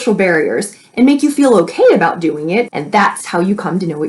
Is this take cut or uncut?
cut